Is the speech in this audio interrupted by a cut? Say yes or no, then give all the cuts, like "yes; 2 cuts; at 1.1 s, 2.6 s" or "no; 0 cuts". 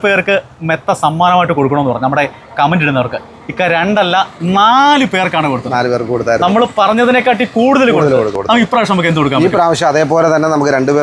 yes; 1 cut; at 8.4 s